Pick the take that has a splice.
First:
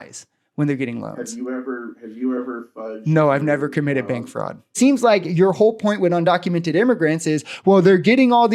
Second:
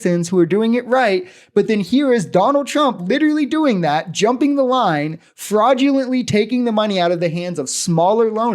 first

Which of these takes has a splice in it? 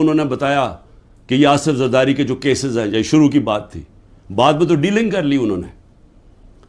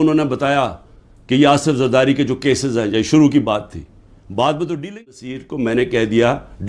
second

